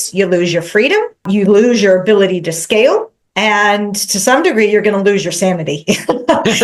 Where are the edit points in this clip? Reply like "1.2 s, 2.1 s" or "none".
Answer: 1.2 s, 3.2 s